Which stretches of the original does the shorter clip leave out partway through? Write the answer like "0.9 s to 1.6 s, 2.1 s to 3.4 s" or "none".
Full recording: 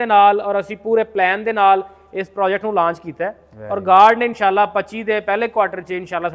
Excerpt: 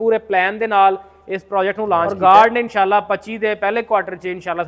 3.0 s to 3.8 s